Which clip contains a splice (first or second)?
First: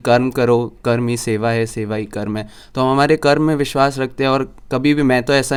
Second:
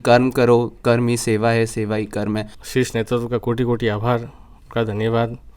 second